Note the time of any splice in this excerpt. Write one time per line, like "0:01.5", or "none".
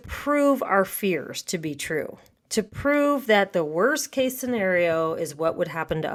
none